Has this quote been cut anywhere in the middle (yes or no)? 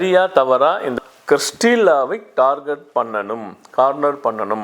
yes